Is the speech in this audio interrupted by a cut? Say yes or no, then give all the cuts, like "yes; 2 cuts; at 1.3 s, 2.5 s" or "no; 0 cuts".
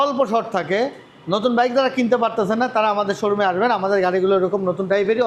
no; 0 cuts